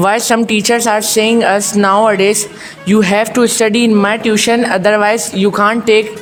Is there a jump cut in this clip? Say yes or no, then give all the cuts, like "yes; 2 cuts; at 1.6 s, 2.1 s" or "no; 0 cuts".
no; 0 cuts